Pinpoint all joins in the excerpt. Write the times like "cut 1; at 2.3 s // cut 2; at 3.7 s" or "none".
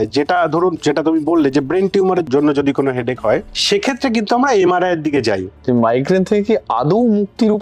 cut 1; at 5.5 s